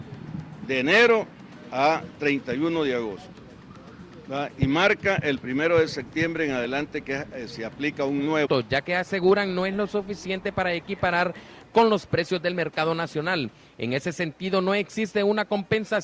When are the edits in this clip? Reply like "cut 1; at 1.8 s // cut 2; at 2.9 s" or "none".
none